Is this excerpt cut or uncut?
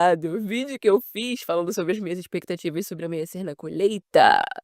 uncut